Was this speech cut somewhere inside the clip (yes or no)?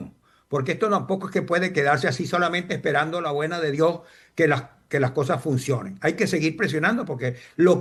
no